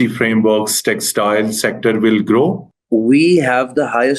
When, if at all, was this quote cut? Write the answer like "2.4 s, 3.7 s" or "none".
2.7 s